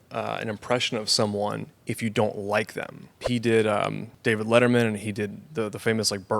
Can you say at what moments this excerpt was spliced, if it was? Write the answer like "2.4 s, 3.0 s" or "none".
3.2 s, 4.1 s